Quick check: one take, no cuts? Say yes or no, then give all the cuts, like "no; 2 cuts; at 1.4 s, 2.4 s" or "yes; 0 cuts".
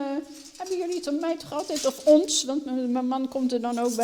yes; 0 cuts